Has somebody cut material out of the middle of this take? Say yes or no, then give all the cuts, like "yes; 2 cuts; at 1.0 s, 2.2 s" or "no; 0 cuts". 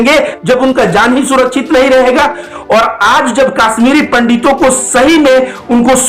yes; 1 cut; at 2.5 s